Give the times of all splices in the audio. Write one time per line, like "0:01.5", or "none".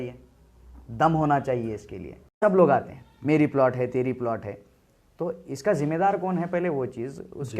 0:02.4